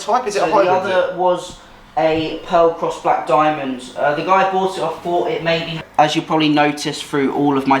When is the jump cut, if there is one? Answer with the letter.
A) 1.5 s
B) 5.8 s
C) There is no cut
B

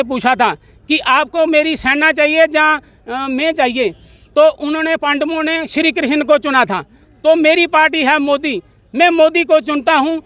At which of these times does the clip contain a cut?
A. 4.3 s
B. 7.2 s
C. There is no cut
C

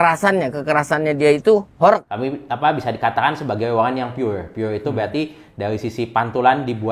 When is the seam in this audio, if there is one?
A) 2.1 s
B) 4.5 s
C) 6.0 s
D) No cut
A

